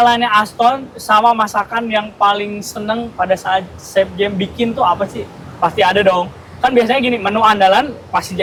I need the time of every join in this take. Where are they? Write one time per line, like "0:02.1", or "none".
none